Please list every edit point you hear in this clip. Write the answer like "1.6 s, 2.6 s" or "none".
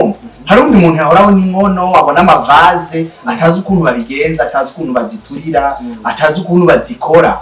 none